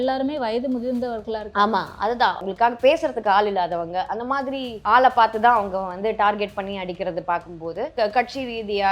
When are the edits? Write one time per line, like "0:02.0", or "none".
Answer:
0:02.5
0:04.8
0:07.9